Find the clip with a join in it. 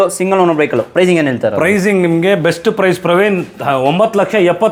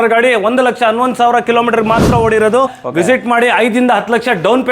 second; 1 cut; at 2.8 s

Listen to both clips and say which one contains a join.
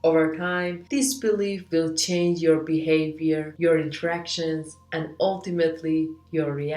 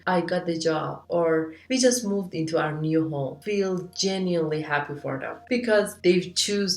second; 1 cut; at 5.3 s

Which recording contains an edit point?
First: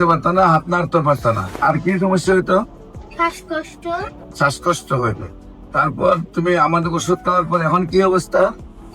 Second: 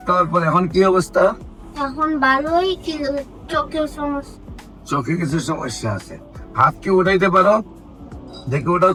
first; 2 cuts; at 1.5 s, 4.2 s

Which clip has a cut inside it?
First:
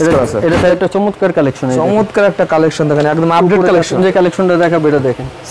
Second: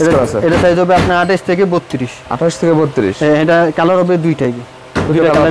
first; 2 cuts; at 0.7 s, 4.0 s

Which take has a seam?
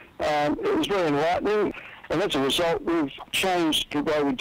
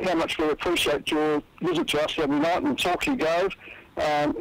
first; 2 cuts; at 1.7 s, 3.2 s

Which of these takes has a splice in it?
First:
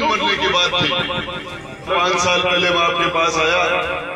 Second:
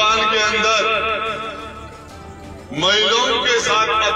first; 1 cut; at 1.9 s

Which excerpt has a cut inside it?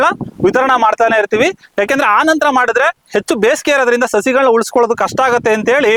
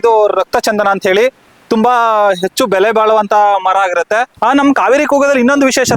second; 1 cut; at 4.3 s

